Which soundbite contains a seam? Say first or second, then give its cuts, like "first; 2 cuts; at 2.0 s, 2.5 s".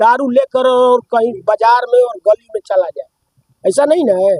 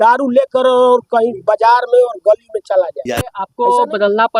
second; 1 cut; at 3.4 s